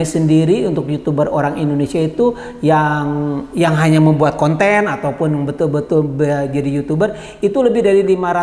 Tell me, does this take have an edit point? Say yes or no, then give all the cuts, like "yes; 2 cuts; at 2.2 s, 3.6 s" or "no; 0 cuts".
no; 0 cuts